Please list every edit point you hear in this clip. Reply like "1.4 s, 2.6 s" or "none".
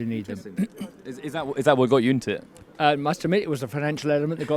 none